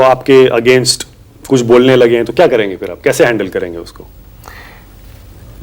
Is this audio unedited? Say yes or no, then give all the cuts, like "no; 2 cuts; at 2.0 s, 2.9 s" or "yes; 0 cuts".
yes; 0 cuts